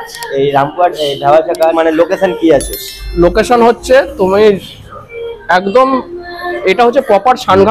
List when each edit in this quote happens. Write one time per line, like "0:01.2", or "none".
0:01.7